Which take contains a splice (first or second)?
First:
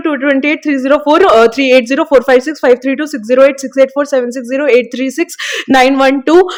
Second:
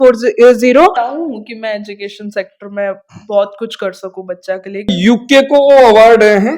second